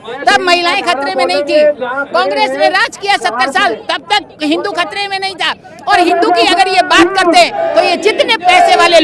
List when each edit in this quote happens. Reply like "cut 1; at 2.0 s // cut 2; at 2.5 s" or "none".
none